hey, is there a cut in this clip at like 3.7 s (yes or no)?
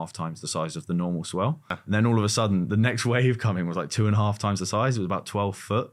no